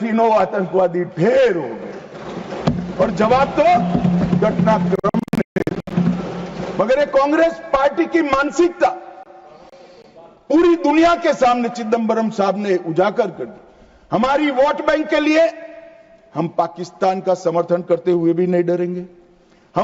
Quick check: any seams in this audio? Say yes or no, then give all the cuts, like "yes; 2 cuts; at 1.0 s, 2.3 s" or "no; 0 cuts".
no; 0 cuts